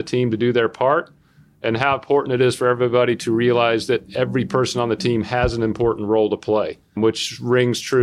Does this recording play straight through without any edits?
no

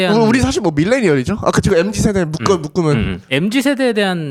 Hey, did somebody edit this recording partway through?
no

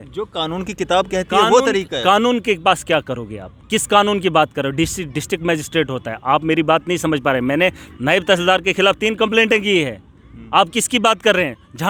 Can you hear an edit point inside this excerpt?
no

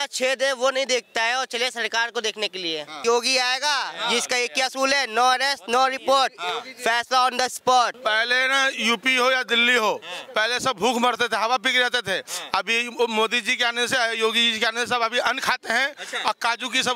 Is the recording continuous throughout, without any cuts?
no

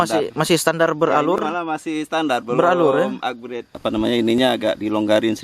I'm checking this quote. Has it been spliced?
yes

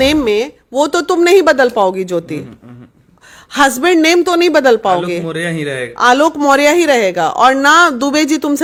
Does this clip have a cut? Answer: no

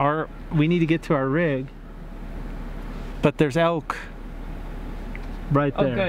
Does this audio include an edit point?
no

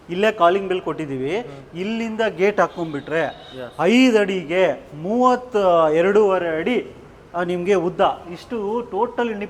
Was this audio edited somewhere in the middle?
no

